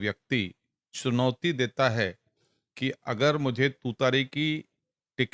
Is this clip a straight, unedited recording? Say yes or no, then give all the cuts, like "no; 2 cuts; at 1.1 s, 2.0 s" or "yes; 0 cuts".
yes; 0 cuts